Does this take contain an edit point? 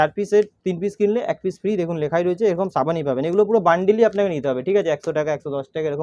no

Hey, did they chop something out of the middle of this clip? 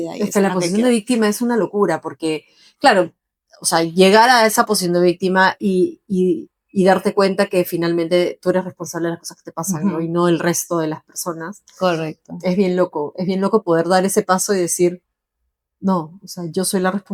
no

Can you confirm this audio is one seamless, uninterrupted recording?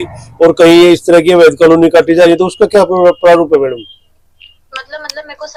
yes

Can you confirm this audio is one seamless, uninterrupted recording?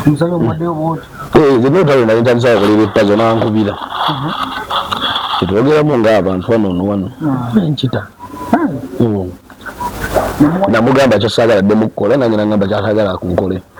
yes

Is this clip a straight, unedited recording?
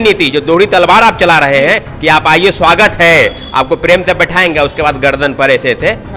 yes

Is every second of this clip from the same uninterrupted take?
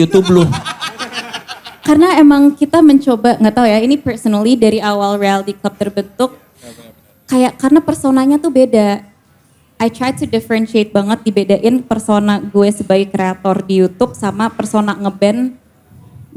yes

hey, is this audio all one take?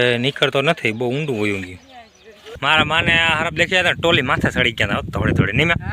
no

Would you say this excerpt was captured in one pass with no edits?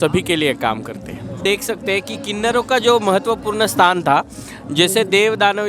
no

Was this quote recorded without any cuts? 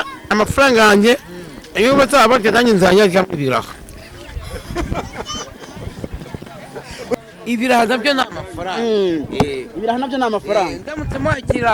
no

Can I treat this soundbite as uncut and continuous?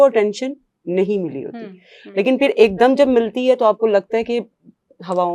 yes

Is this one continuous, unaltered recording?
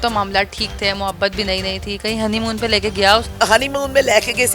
no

